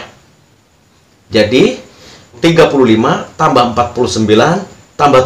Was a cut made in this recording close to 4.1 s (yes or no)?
no